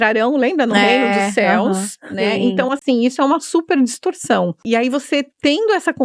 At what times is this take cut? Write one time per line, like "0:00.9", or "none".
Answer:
0:04.6